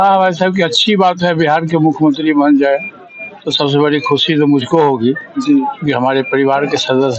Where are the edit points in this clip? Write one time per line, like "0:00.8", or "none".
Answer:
none